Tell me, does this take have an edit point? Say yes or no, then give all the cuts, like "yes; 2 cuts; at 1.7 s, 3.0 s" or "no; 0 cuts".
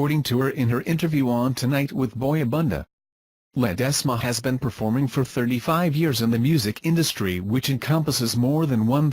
yes; 1 cut; at 5.6 s